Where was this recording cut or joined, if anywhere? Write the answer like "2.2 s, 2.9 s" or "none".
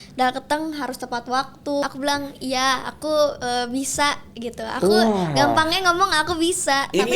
1.8 s